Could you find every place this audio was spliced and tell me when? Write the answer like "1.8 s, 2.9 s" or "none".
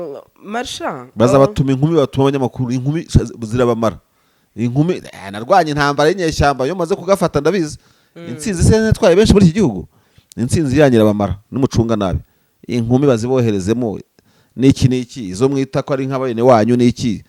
none